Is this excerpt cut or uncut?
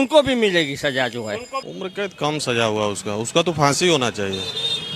uncut